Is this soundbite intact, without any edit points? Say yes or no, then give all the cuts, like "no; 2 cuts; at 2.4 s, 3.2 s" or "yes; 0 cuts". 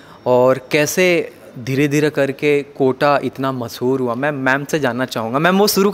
yes; 0 cuts